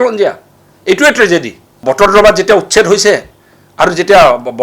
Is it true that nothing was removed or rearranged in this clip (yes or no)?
no